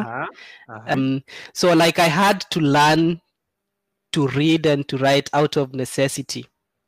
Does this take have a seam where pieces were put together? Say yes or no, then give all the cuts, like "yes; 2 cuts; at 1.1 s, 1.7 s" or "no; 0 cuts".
yes; 1 cut; at 1.0 s